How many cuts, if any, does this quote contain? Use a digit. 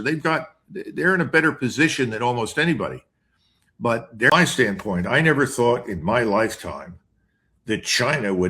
1